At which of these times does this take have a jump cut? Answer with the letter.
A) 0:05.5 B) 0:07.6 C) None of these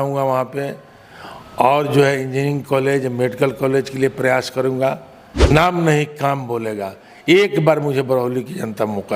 A